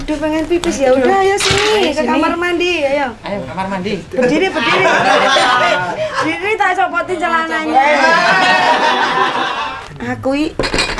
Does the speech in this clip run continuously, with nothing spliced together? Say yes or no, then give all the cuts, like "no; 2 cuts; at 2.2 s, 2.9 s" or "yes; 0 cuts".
no; 1 cut; at 9.6 s